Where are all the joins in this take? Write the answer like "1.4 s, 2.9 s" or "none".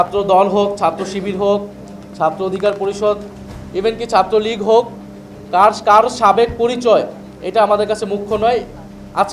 none